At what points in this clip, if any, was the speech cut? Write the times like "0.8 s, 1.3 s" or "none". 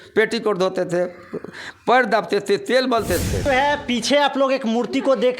3.4 s